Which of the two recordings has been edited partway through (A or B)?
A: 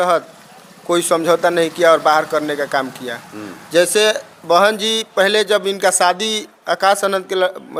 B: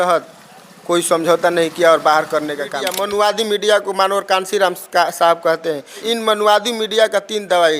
B